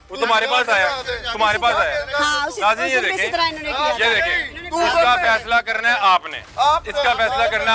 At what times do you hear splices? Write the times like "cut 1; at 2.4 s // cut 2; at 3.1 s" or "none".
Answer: none